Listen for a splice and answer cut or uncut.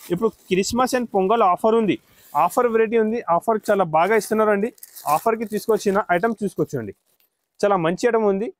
uncut